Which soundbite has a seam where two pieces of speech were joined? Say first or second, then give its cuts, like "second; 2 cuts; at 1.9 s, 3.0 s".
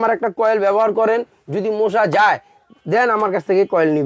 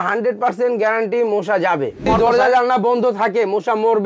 second; 1 cut; at 2.1 s